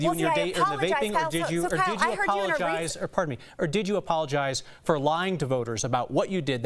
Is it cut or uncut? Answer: uncut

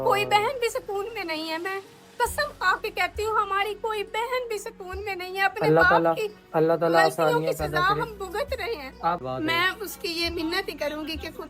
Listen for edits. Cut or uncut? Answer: cut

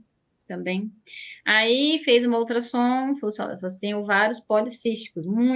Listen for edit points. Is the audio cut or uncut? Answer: uncut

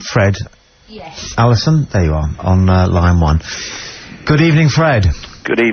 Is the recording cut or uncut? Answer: uncut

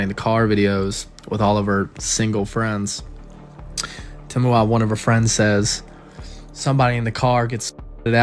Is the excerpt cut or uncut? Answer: uncut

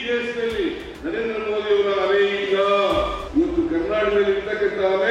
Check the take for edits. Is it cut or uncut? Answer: cut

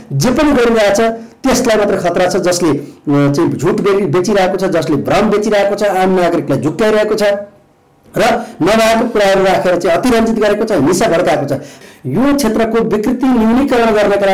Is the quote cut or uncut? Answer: cut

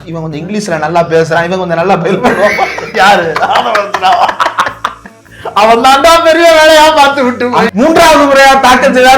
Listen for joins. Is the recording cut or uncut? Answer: cut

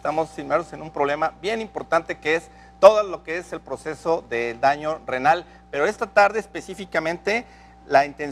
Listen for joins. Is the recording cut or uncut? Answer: uncut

